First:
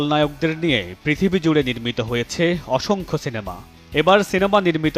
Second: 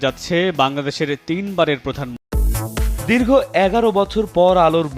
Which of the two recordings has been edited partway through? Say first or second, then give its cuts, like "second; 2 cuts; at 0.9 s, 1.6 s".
second; 1 cut; at 2.1 s